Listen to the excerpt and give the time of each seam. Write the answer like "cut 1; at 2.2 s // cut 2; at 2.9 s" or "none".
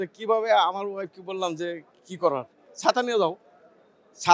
none

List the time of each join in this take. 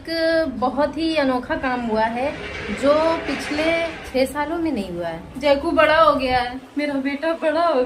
cut 1; at 4.0 s // cut 2; at 5.2 s

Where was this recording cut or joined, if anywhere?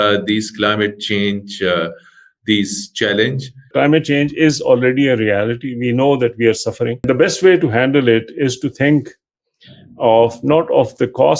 cut 1; at 3.7 s // cut 2; at 7.1 s

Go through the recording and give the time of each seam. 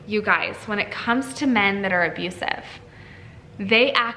none

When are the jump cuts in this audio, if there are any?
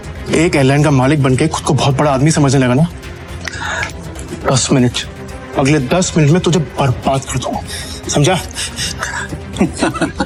none

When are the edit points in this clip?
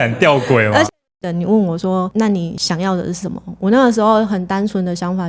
cut 1; at 0.9 s // cut 2; at 2.5 s

